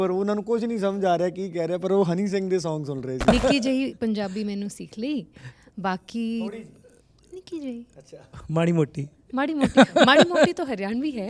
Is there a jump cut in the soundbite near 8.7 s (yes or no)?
no